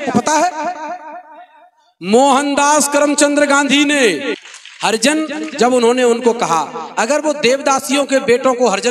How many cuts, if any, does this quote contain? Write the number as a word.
one